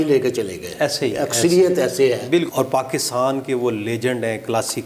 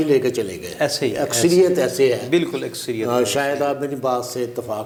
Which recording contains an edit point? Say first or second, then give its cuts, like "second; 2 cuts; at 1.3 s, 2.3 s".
first; 1 cut; at 2.5 s